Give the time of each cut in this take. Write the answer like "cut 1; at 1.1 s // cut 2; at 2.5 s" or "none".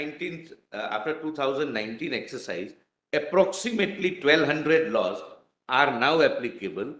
none